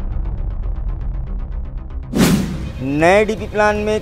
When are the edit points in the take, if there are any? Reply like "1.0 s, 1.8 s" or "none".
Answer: 2.6 s